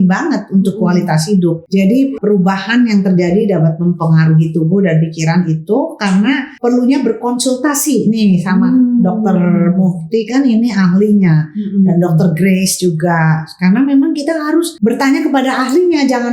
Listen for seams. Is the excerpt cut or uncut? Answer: cut